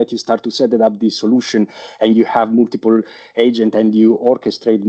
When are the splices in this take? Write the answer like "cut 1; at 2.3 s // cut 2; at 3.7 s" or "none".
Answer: none